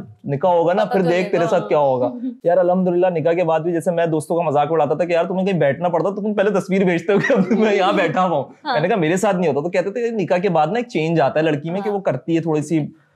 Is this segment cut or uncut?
uncut